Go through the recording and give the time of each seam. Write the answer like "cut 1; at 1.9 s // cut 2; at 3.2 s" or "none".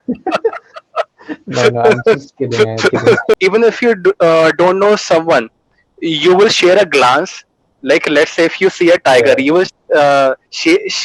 cut 1; at 3.3 s